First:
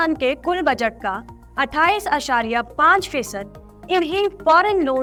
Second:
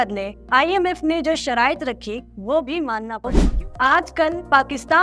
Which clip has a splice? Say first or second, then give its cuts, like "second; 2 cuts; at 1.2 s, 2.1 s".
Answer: second; 1 cut; at 3.4 s